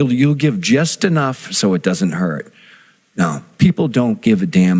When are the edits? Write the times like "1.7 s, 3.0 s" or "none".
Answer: none